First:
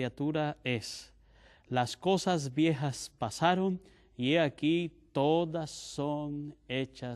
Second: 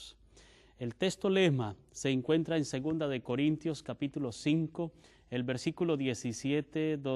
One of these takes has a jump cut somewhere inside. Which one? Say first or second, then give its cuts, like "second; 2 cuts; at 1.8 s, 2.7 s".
second; 1 cut; at 3.3 s